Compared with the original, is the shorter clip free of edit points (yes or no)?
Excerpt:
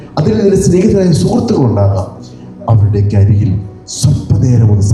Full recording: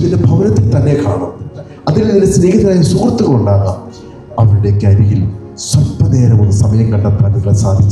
yes